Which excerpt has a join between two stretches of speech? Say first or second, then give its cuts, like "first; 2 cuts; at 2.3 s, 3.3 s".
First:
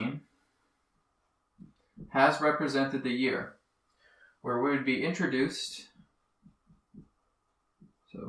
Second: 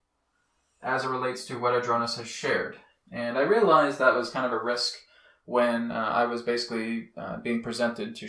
first; 1 cut; at 2.6 s